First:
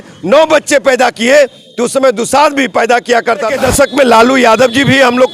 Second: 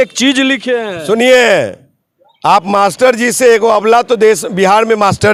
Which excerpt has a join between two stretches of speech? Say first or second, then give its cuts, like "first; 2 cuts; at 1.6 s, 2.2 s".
first; 1 cut; at 3.5 s